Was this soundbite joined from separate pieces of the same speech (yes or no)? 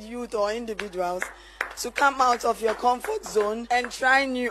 yes